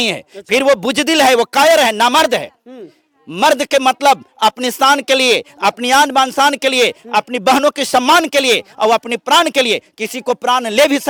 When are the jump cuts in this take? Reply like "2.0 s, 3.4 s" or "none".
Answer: none